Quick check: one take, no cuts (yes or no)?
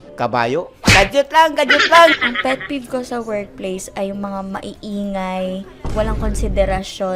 yes